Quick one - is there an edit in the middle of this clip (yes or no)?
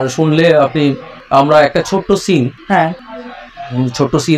no